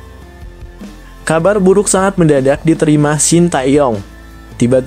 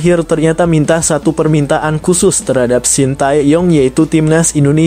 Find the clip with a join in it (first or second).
first